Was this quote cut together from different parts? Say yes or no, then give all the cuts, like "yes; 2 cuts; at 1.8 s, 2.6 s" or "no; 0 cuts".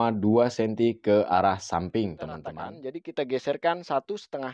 yes; 1 cut; at 2.6 s